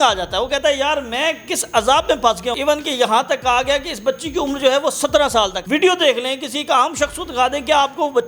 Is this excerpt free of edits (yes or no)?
no